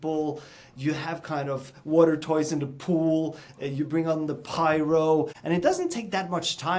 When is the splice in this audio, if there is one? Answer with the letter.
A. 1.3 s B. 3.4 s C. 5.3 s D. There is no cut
C